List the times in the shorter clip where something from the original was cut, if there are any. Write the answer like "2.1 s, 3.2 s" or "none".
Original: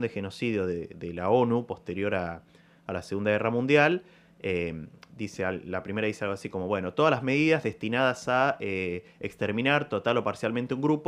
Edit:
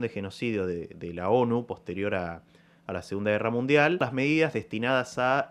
4.0 s